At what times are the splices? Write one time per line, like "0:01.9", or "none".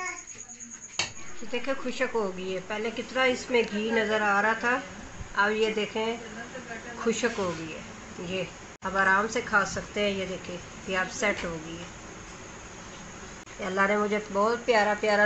0:01.2
0:08.7
0:13.5